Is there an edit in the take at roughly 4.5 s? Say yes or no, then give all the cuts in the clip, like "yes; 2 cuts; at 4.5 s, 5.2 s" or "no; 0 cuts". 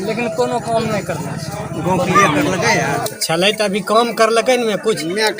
no; 1 cut; at 3.1 s